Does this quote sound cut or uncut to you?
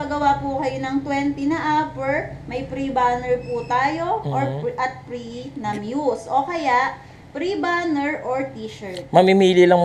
uncut